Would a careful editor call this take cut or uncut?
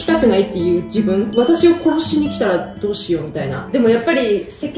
cut